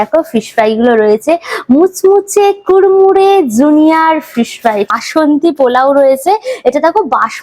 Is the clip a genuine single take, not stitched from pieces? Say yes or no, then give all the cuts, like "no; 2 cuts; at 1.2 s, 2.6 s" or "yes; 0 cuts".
no; 1 cut; at 5.0 s